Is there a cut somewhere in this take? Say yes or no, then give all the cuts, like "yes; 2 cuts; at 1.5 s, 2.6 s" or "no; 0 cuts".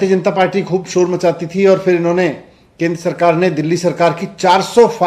no; 0 cuts